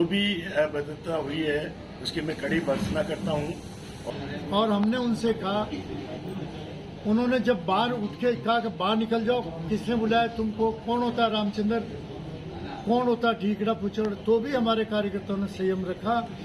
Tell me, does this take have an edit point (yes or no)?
yes